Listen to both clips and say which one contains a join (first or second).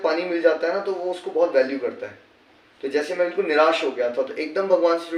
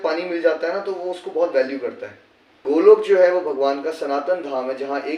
second